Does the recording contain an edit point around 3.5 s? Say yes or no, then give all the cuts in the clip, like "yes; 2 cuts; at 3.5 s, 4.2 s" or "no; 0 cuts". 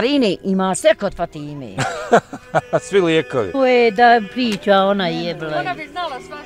yes; 1 cut; at 3.5 s